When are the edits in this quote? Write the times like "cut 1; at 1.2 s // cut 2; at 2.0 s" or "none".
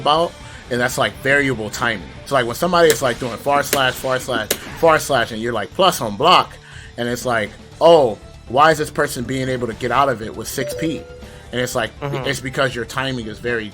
cut 1; at 2.1 s